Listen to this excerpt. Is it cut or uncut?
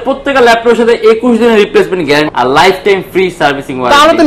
cut